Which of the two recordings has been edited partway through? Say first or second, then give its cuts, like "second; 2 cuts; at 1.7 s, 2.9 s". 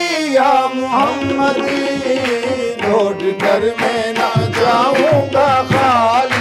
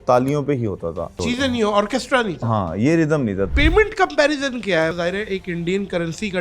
second; 3 cuts; at 1.2 s, 3.5 s, 4.9 s